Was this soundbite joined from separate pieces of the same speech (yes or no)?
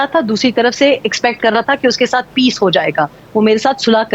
yes